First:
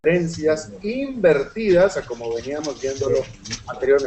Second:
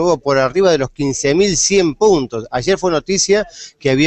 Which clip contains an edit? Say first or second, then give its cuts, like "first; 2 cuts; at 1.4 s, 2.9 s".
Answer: first; 1 cut; at 1.8 s